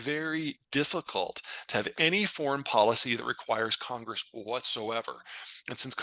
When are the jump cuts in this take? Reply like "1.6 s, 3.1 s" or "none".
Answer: none